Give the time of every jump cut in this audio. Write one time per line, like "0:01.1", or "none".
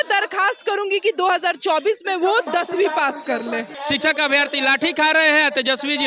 0:03.7